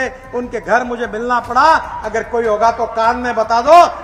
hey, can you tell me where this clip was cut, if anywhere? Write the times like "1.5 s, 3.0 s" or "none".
none